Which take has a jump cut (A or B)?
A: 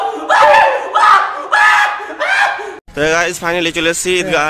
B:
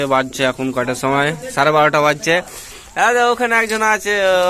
A